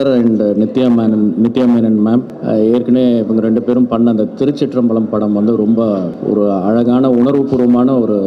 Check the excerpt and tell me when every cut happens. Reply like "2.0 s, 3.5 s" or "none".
2.4 s, 6.1 s